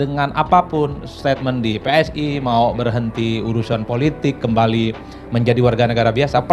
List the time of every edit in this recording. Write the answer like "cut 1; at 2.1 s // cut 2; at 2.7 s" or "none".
none